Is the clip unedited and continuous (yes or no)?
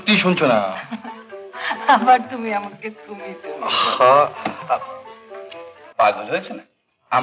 no